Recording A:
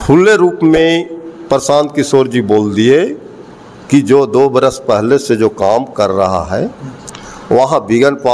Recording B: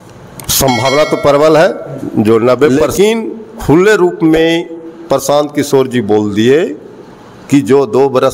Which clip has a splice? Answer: B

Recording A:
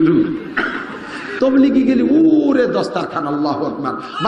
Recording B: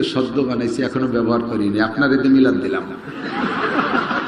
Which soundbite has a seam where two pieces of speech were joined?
A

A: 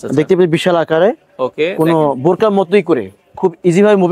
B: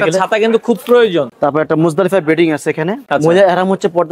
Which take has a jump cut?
B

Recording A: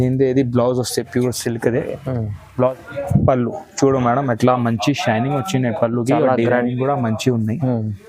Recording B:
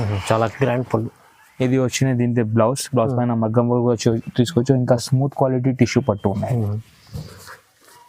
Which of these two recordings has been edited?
A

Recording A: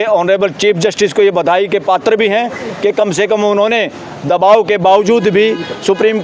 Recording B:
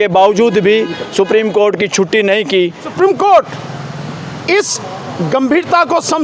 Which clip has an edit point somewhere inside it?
B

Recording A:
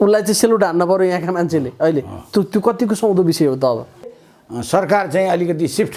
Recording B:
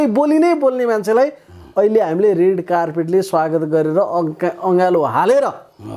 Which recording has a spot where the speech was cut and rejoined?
A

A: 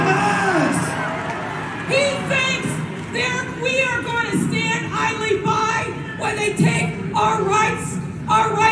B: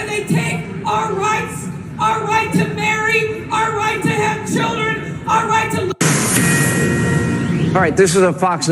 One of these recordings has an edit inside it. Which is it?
B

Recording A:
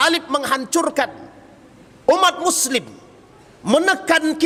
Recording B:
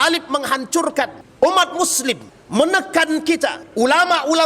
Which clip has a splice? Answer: B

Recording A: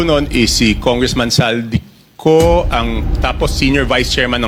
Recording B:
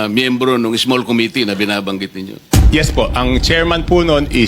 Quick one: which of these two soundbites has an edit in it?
B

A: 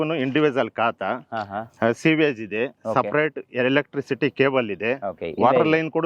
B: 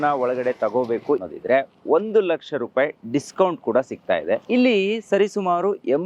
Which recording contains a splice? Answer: B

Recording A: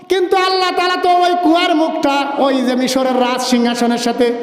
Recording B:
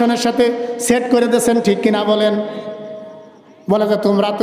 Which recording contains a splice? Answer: A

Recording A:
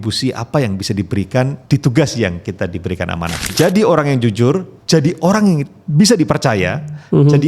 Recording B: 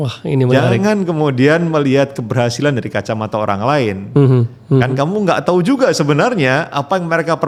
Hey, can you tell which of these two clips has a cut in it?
A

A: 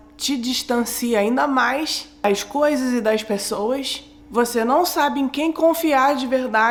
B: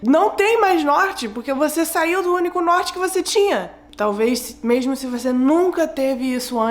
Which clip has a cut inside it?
B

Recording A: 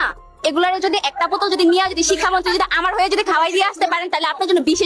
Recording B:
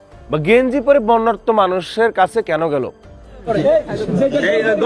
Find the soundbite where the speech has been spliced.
B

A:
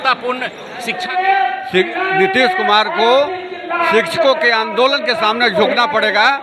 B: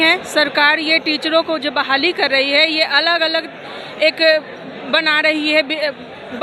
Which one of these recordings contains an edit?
A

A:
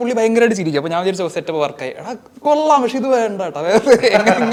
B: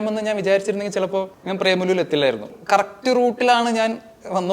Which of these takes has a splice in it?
B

